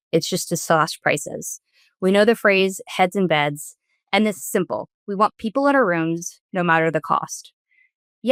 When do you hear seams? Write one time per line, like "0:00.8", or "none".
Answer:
none